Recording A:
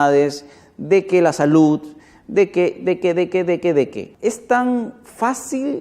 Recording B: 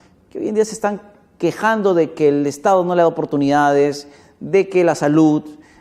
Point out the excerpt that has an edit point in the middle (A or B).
A